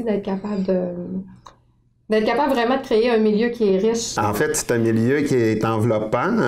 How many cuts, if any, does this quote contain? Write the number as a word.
one